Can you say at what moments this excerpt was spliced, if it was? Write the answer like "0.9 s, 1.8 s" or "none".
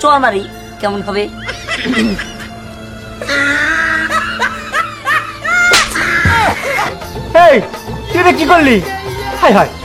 6.9 s